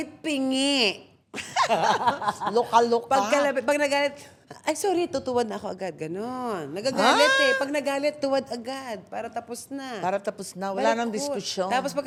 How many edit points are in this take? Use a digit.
0